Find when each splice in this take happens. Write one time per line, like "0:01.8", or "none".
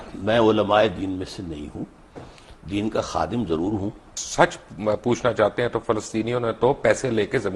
0:04.2